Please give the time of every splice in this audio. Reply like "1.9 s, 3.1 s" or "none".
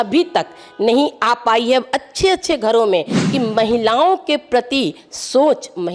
3.2 s